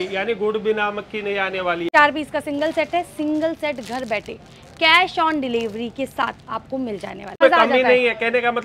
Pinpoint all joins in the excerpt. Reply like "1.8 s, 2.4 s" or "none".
1.9 s, 7.4 s